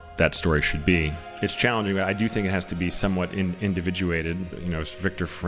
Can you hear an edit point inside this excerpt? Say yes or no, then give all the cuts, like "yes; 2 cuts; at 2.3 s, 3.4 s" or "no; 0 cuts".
yes; 2 cuts; at 1.2 s, 4.5 s